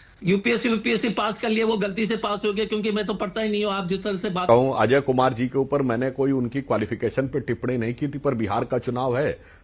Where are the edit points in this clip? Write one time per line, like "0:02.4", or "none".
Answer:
0:04.4